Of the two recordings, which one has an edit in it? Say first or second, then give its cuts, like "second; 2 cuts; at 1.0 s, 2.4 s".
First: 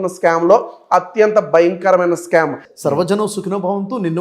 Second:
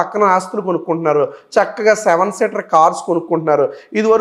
first; 1 cut; at 2.7 s